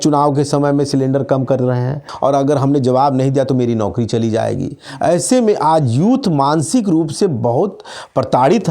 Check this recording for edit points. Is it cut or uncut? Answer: cut